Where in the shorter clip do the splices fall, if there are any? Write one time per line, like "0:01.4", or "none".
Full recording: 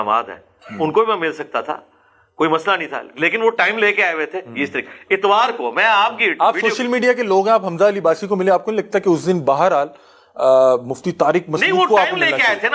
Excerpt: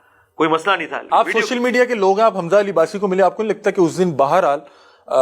0:01.1